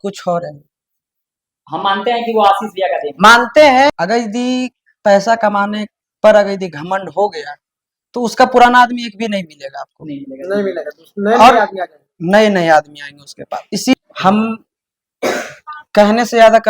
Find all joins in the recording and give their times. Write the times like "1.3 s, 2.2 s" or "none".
3.9 s, 13.9 s